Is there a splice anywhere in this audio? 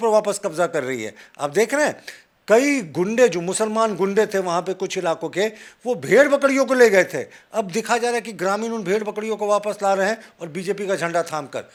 no; 0 cuts

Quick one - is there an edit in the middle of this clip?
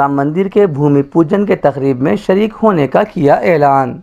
no; 0 cuts

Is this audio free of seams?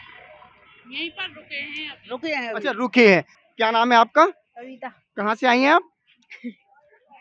no; 1 cut; at 3.3 s

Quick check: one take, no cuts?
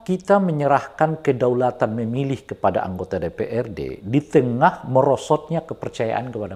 yes; 0 cuts

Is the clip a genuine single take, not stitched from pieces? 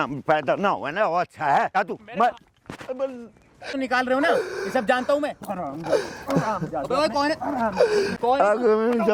no; 3 cuts; at 1.8 s, 3.8 s, 8.2 s

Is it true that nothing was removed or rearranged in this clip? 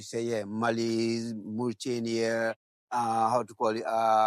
yes; 0 cuts

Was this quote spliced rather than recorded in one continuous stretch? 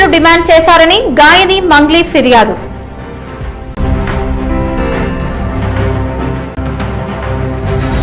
yes; 1 cut; at 6.6 s

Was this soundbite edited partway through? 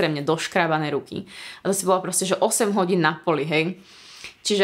no; 0 cuts

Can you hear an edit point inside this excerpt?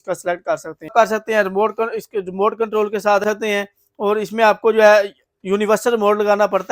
yes; 2 cuts; at 0.9 s, 3.2 s

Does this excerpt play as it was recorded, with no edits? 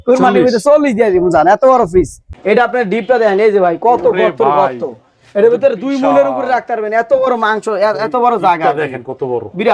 no; 1 cut; at 2.3 s

